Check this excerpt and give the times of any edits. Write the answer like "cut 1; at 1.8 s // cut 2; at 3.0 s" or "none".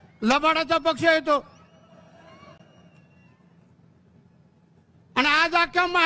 none